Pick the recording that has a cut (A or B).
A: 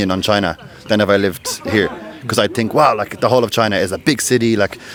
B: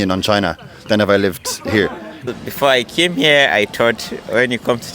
B